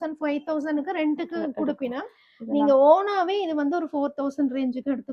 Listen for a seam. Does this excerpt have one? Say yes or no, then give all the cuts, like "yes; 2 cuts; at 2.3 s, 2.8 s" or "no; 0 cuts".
no; 0 cuts